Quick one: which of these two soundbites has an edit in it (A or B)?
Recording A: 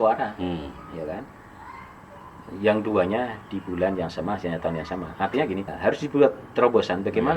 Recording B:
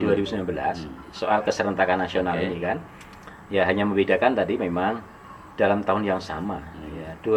A